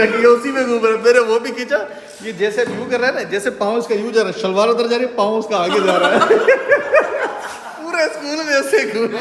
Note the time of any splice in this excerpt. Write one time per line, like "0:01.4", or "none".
none